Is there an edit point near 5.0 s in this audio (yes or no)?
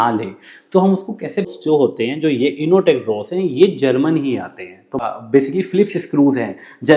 yes